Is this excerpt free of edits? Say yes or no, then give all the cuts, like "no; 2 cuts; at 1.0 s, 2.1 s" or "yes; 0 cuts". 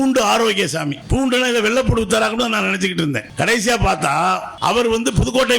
no; 3 cuts; at 1.0 s, 3.3 s, 4.5 s